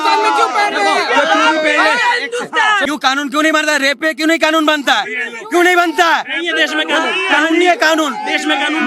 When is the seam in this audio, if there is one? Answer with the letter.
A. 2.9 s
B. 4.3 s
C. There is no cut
A